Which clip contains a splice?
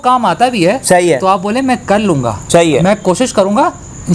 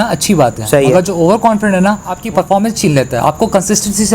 second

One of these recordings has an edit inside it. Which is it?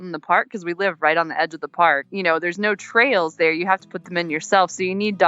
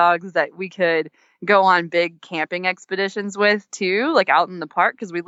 first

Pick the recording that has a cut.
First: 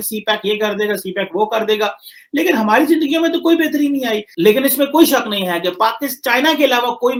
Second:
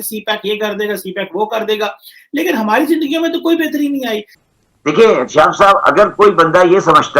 second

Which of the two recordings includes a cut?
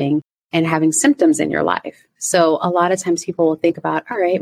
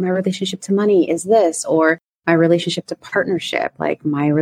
first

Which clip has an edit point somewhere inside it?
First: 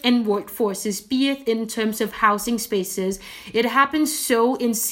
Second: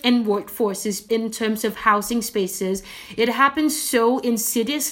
second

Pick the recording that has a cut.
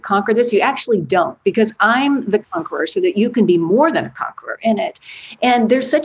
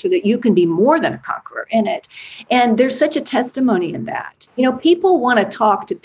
second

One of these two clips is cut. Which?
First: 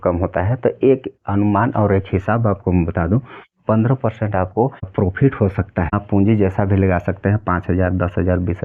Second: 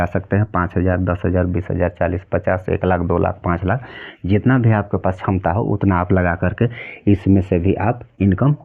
first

